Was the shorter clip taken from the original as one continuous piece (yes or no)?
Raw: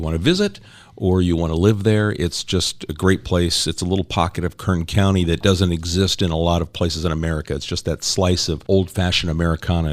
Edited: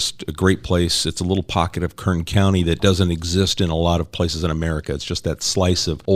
yes